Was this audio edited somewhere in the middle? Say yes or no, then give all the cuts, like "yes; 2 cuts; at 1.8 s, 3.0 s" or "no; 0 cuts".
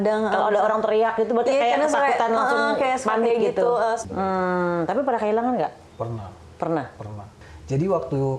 yes; 2 cuts; at 4.0 s, 5.9 s